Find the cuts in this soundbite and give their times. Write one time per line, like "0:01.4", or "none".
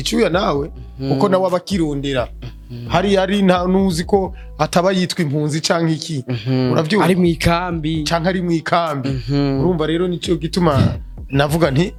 none